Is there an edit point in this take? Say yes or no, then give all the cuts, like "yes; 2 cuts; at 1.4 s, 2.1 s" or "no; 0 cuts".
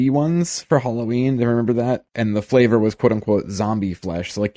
yes; 1 cut; at 2.1 s